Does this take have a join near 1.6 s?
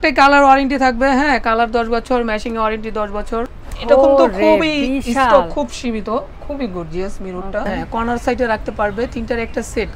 no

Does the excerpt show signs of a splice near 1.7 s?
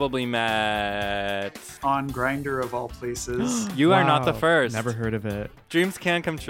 yes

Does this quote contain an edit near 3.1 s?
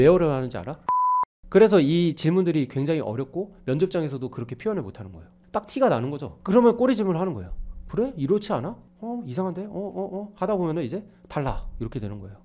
no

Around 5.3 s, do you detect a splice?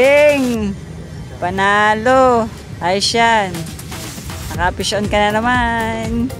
no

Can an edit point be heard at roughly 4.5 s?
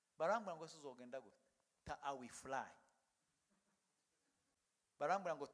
yes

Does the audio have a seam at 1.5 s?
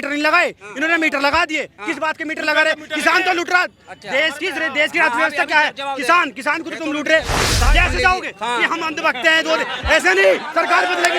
no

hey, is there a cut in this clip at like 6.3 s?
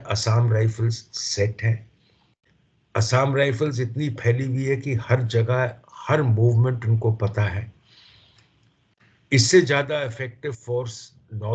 no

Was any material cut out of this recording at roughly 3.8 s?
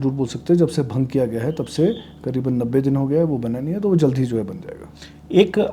no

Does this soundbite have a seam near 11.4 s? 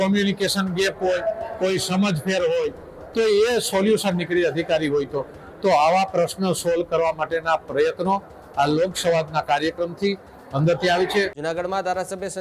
yes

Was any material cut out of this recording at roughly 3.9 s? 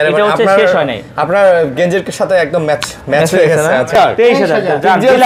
yes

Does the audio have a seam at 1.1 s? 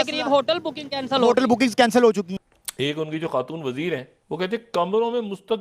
no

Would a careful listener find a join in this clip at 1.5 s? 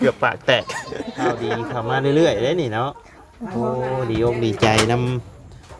yes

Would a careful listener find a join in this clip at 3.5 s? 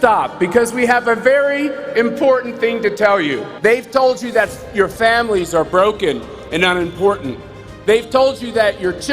yes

